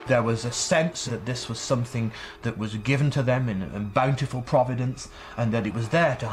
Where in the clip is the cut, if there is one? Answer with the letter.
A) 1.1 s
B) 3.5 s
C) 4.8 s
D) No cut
A